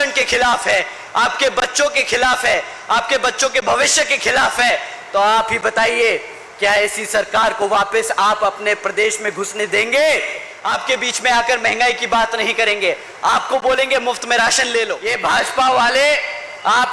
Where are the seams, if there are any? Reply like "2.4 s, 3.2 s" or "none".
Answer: 10.5 s, 15.0 s